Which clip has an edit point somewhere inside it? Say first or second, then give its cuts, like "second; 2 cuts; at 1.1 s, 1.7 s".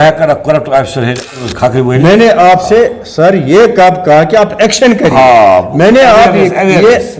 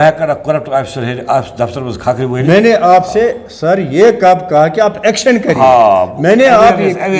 first; 1 cut; at 1.2 s